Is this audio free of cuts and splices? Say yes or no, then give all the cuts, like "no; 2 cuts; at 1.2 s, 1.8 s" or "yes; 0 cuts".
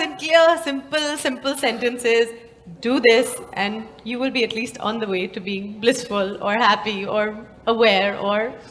yes; 0 cuts